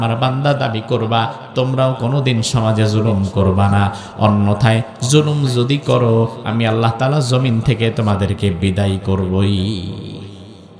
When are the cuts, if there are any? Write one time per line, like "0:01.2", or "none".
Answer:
none